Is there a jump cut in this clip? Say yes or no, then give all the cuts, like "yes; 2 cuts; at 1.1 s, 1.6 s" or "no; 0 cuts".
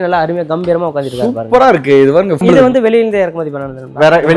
yes; 1 cut; at 2.4 s